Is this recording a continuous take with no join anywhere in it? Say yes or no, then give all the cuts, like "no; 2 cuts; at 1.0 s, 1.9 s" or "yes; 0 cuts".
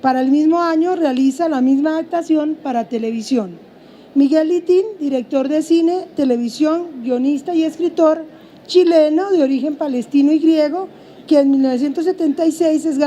no; 1 cut; at 10.0 s